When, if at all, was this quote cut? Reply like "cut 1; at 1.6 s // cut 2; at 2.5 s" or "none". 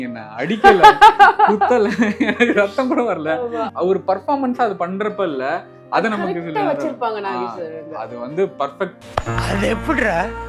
none